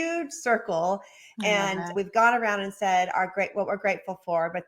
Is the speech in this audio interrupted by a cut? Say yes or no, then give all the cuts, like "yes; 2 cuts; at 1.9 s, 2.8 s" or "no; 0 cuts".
yes; 1 cut; at 1.9 s